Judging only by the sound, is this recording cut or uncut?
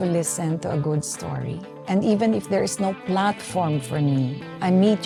uncut